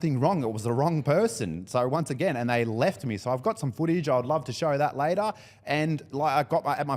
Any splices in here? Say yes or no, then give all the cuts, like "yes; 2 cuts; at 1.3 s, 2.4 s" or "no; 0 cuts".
no; 0 cuts